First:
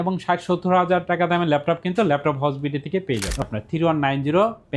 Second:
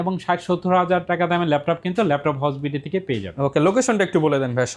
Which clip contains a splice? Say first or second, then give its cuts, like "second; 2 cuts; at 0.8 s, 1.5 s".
first; 1 cut; at 3.4 s